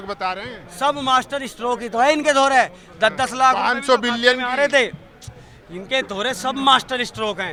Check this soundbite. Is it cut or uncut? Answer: uncut